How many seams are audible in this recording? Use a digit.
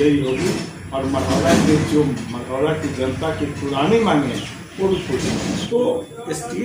1